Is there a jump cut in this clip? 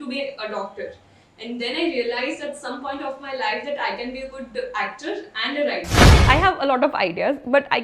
yes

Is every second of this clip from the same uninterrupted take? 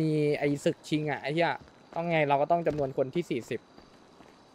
yes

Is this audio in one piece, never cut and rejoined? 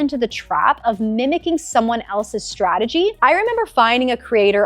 no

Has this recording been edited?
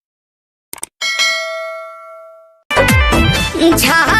yes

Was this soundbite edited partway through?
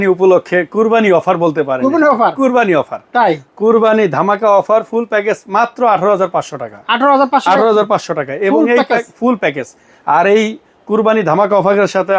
no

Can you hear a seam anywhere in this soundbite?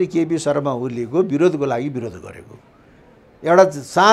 no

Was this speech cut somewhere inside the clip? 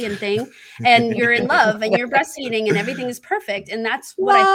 no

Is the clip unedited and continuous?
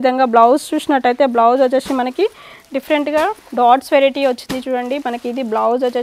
yes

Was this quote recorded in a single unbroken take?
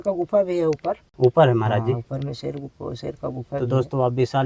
yes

